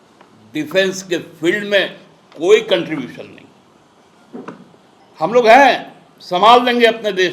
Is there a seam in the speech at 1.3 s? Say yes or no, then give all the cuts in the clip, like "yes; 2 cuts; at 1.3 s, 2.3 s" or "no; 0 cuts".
no; 1 cut; at 5.0 s